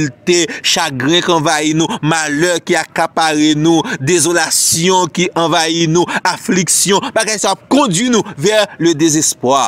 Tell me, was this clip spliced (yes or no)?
no